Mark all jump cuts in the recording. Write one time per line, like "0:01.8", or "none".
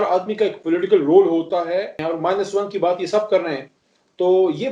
0:01.9